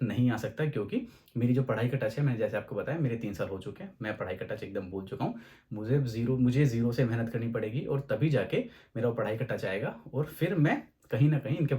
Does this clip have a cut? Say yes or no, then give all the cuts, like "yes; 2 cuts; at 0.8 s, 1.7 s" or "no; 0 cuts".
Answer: no; 0 cuts